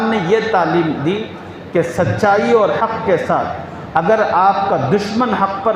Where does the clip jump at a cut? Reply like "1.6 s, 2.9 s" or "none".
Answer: none